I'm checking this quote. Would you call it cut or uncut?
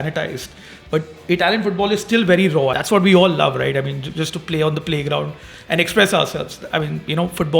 cut